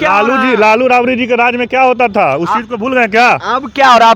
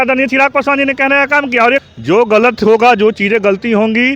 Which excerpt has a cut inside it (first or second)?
second